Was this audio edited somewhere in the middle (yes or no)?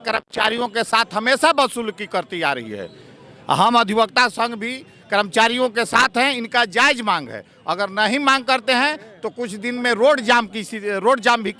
no